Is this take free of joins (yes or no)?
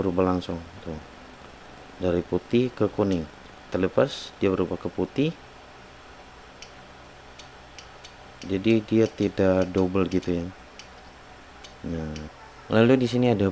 no